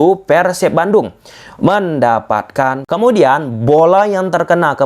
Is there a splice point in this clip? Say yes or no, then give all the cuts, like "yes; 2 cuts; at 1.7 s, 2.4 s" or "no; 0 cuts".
yes; 1 cut; at 2.8 s